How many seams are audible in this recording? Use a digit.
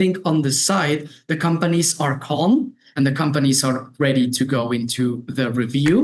0